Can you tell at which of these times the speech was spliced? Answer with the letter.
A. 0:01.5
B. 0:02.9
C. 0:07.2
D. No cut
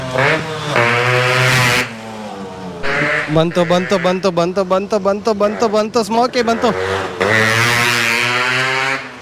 B